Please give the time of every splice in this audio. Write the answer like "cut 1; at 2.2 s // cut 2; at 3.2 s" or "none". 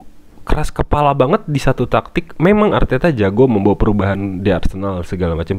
none